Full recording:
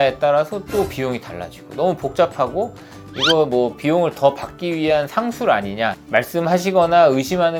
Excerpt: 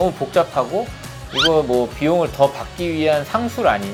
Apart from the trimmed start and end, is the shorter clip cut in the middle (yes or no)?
no